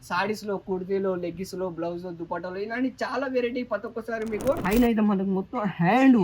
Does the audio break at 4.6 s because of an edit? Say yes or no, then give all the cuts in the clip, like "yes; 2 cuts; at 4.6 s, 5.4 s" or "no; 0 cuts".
yes; 1 cut; at 4.6 s